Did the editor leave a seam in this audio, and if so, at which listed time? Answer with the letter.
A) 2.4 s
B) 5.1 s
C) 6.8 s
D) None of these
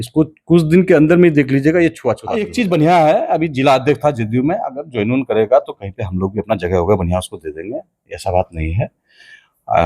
A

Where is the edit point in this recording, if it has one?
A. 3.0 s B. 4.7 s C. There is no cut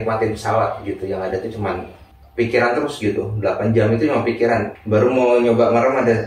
B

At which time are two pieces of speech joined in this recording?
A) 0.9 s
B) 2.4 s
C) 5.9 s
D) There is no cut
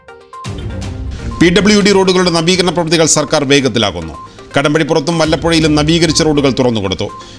A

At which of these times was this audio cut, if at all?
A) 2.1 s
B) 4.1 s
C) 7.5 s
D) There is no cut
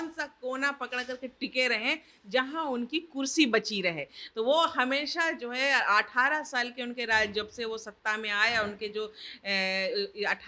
D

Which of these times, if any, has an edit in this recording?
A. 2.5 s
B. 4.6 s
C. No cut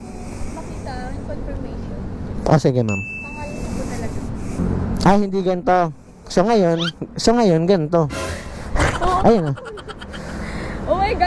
B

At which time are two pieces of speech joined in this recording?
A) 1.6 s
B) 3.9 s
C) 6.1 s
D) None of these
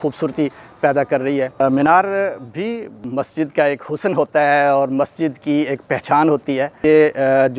D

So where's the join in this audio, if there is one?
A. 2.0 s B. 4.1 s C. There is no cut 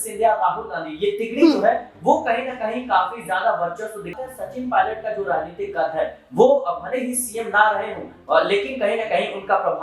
B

